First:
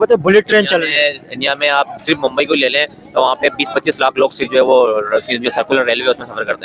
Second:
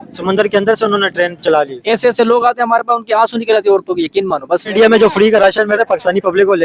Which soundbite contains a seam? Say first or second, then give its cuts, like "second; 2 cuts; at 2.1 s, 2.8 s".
second; 2 cuts; at 1.8 s, 4.7 s